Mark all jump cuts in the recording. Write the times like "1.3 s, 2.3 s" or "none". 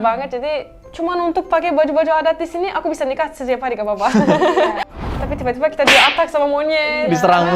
5.1 s